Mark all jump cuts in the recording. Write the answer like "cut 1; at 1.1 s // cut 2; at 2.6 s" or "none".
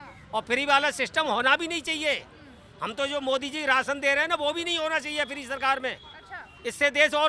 none